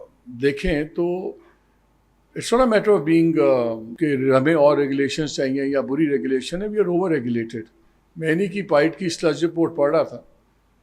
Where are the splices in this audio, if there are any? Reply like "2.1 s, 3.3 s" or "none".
3.8 s